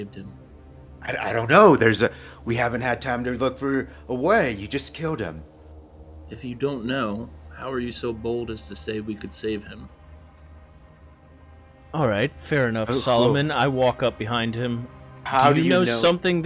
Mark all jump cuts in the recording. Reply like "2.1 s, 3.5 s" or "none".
none